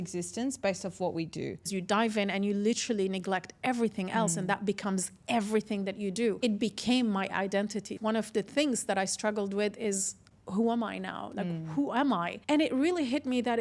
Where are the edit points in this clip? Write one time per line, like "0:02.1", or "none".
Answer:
0:01.7
0:06.4
0:07.9
0:12.3